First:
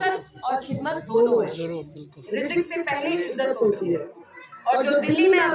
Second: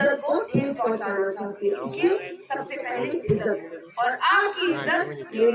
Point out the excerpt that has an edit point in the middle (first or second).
first